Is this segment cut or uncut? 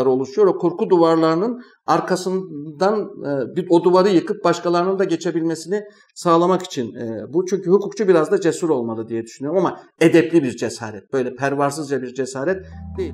uncut